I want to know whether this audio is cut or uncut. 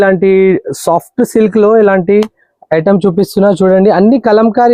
uncut